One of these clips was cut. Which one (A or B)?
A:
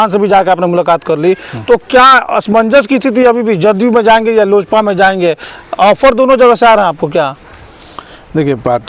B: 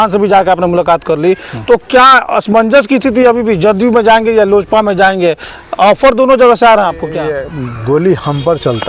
B